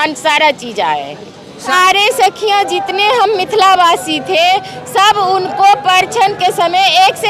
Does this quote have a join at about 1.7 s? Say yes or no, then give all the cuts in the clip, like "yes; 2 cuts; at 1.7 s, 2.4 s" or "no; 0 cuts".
yes; 1 cut; at 1.7 s